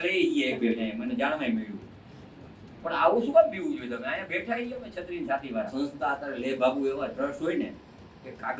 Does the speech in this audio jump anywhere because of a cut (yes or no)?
yes